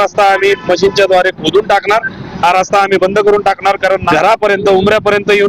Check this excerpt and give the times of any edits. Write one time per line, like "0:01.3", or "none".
0:04.1